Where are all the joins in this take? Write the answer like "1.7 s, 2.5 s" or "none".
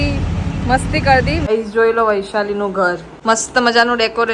1.5 s, 3.1 s